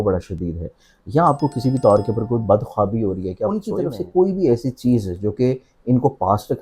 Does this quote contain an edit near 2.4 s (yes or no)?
no